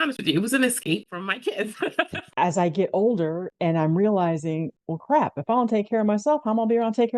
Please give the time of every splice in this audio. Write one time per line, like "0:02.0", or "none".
0:02.2

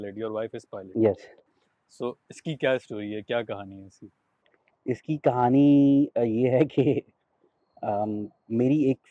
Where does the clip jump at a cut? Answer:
none

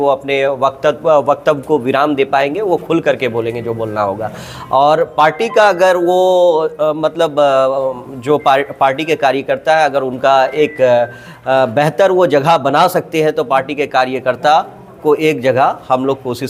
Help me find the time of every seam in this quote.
none

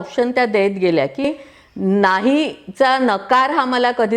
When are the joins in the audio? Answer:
0:01.2

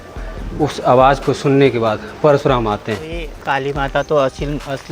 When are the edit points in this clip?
0:03.3

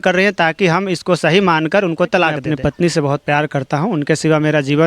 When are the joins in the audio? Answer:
0:02.5

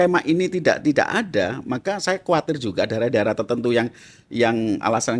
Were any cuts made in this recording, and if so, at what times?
none

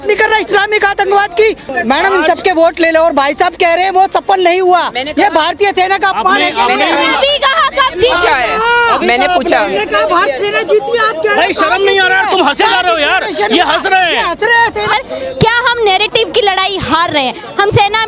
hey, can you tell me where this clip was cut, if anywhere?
0:01.7
0:14.9

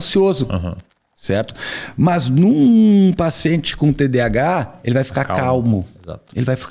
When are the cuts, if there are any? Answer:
none

